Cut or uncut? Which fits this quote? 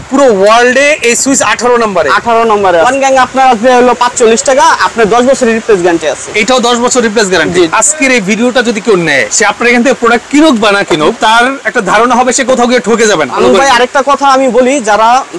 cut